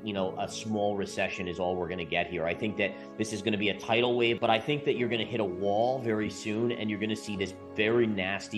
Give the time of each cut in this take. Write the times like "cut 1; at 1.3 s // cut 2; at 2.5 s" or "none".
cut 1; at 4.4 s